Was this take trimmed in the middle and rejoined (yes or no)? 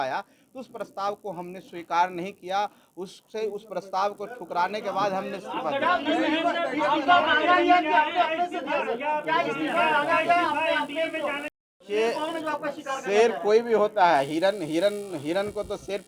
no